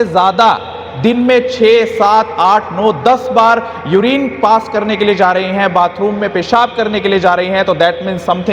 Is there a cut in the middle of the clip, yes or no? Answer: no